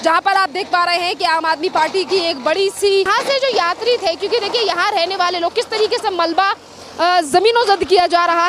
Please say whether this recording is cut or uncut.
cut